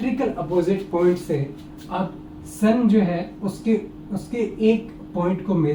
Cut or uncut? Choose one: uncut